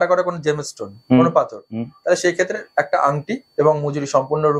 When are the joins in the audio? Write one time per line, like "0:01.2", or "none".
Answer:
none